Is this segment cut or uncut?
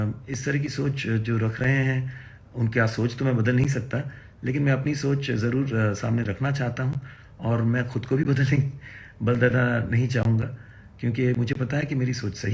uncut